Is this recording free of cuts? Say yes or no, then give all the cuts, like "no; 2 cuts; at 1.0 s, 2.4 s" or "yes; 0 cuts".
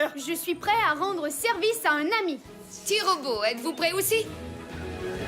no; 1 cut; at 4.3 s